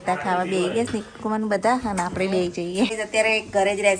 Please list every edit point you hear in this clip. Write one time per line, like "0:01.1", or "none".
0:02.9